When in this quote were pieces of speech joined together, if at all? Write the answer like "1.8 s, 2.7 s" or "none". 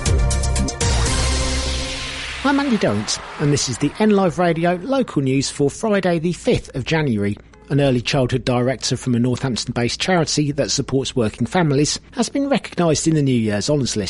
2.2 s